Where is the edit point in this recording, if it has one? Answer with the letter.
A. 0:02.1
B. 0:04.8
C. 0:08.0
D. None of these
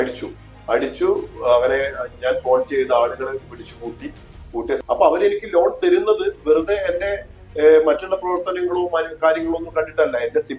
B